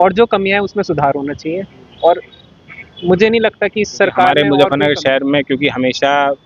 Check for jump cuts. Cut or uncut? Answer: cut